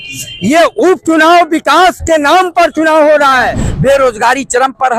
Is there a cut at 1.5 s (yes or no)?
no